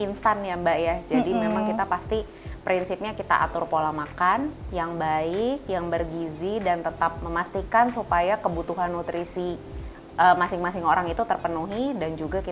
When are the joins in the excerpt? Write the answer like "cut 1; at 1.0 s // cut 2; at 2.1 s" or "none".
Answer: none